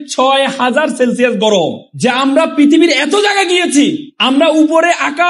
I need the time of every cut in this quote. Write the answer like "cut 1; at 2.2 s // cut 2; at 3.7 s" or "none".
cut 1; at 1.9 s // cut 2; at 4.1 s